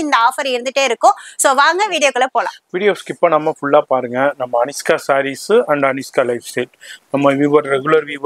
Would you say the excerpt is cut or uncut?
uncut